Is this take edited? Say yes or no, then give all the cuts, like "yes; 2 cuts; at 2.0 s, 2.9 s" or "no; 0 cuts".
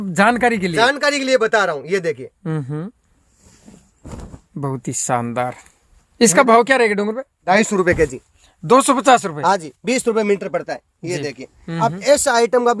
yes; 1 cut; at 7.5 s